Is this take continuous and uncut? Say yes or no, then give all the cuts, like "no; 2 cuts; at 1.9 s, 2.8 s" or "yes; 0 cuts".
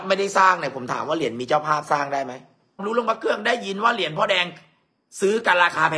no; 1 cut; at 2.8 s